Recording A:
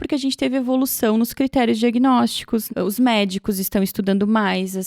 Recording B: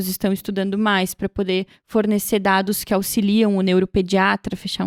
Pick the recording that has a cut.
A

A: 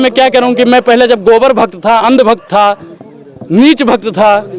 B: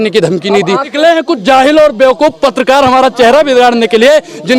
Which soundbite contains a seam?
B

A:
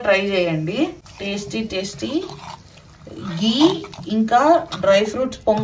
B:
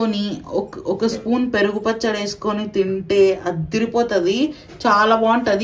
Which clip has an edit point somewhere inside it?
A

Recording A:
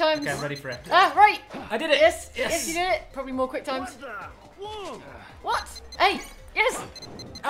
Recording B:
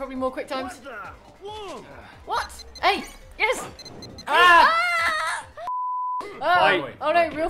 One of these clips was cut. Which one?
B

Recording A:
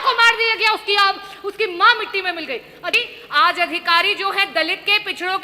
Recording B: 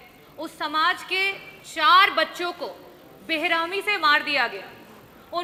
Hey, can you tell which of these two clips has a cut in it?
A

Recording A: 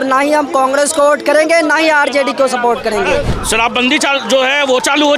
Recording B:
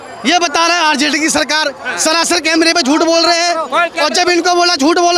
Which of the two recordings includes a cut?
A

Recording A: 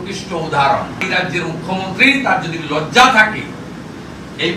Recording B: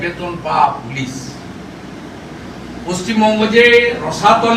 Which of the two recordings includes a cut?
A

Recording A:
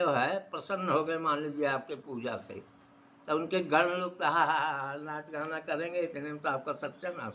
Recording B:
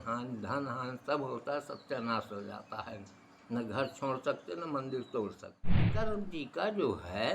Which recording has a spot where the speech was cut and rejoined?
B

